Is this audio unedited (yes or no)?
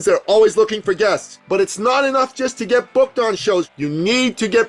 no